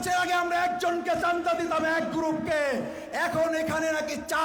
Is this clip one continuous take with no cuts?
yes; 0 cuts

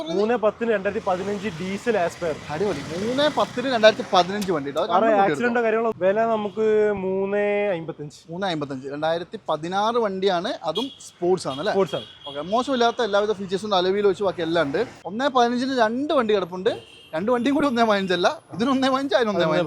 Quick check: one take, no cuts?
no; 2 cuts; at 5.9 s, 15.0 s

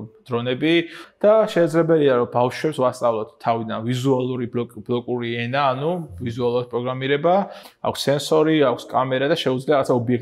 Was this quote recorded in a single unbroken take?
no; 2 cuts; at 1.0 s, 7.6 s

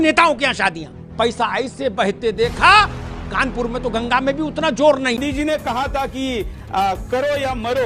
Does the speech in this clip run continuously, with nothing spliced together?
no; 1 cut; at 5.2 s

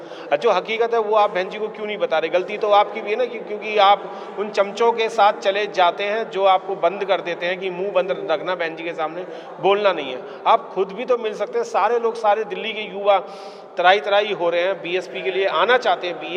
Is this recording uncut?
yes; 0 cuts

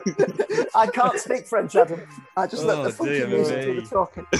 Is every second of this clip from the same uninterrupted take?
yes; 0 cuts

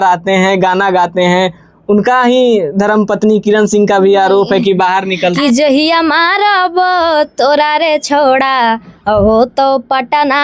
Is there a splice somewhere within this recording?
yes; 1 cut; at 5.4 s

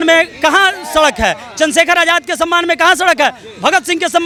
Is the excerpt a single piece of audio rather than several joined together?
yes; 0 cuts

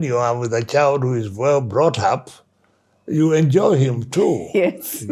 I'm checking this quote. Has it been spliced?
no; 0 cuts

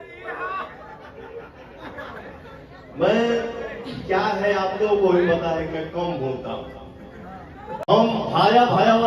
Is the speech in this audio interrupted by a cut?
yes; 1 cut; at 7.8 s

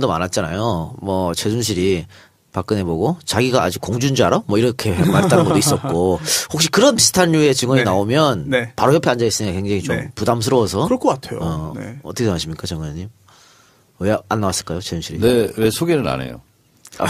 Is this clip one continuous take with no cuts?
no; 1 cut; at 8.5 s

